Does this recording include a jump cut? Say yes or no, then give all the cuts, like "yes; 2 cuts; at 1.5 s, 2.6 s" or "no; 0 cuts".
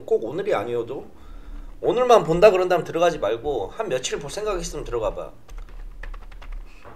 yes; 1 cut; at 5.7 s